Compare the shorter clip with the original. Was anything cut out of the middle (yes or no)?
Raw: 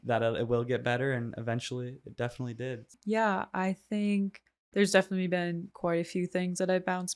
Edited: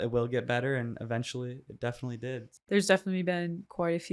yes